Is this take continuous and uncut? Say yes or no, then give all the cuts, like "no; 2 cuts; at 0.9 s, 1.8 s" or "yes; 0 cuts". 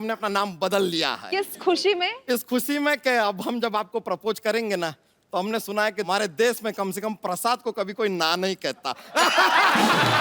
no; 1 cut; at 6.1 s